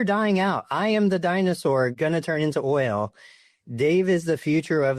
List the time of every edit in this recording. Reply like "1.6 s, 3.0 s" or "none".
1.9 s